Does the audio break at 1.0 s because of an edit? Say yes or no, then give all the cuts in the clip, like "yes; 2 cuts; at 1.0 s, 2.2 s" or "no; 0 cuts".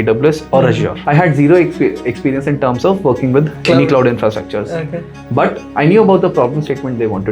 yes; 1 cut; at 1.0 s